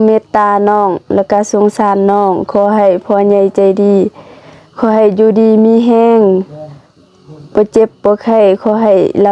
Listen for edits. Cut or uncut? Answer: uncut